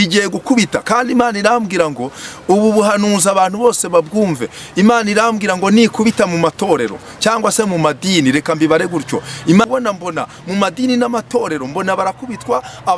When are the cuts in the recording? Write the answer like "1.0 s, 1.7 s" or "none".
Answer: none